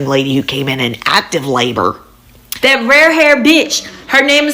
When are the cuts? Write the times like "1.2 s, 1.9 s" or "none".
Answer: 2.5 s